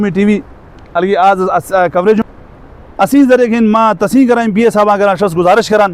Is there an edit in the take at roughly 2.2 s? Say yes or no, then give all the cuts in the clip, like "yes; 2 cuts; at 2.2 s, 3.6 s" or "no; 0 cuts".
yes; 1 cut; at 2.2 s